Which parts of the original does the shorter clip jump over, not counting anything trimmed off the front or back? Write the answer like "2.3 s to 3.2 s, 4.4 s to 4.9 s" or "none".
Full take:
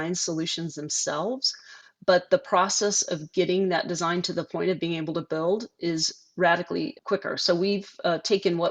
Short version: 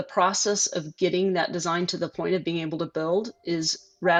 none